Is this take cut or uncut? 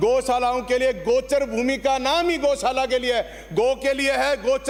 uncut